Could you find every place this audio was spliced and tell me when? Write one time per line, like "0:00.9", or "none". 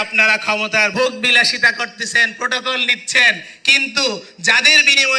0:00.9

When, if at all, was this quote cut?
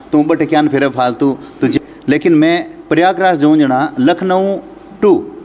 0:01.8

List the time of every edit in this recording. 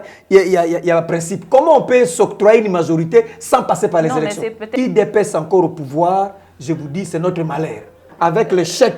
0:04.6
0:08.0

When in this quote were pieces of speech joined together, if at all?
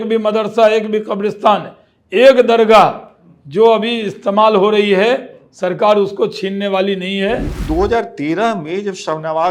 0:07.5

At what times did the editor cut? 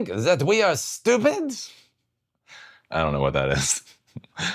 0:03.2

